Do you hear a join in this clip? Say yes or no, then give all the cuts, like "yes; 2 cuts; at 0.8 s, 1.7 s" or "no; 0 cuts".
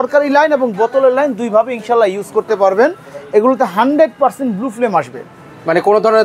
no; 0 cuts